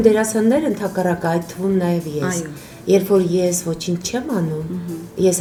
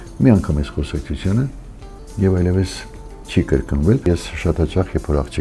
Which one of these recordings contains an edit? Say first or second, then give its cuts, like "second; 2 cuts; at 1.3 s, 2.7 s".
second; 1 cut; at 4.1 s